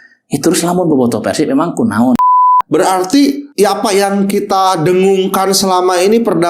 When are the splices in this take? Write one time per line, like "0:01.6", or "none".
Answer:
0:02.3